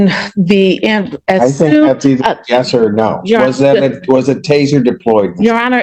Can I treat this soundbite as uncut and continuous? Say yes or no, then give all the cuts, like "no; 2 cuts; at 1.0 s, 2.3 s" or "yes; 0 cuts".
yes; 0 cuts